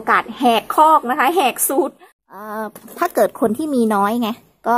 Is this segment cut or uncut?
cut